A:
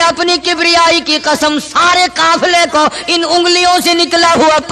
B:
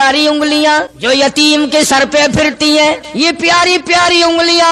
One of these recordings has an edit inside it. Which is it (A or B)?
B